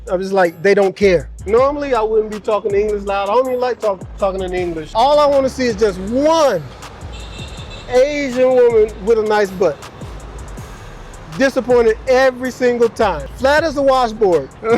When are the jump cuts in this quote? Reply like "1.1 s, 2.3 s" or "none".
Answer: 1.4 s, 4.8 s, 13.2 s